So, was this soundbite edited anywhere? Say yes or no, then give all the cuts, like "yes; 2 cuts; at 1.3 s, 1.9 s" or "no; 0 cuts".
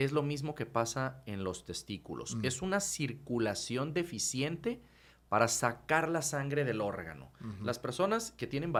no; 0 cuts